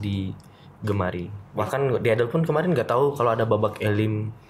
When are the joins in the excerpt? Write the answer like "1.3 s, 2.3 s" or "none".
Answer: 1.4 s